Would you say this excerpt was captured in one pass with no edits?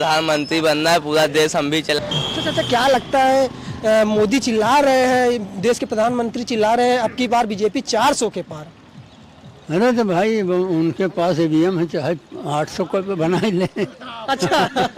no; 1 cut; at 2.0 s

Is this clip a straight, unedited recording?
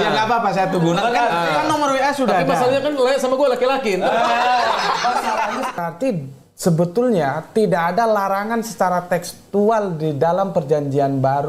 no; 1 cut; at 5.8 s

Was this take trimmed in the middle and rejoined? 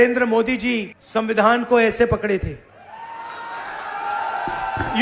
yes; 1 cut; at 0.9 s

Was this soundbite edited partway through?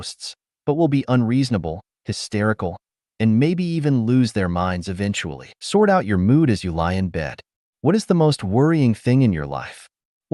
no; 0 cuts

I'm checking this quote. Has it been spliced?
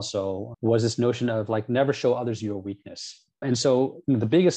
yes; 1 cut; at 3.4 s

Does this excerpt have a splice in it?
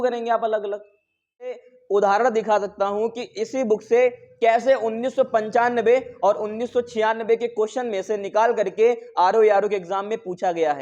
yes; 1 cut; at 1.7 s

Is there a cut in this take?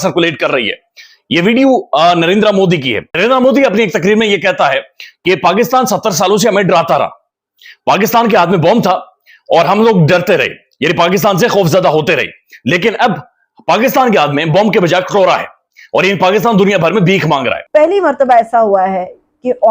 yes; 2 cuts; at 3.1 s, 17.6 s

